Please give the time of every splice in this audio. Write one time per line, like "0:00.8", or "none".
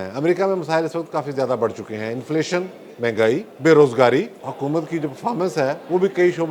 0:03.5
0:04.4